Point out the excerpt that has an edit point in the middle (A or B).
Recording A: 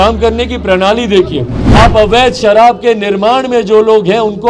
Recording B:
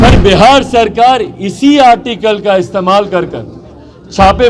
A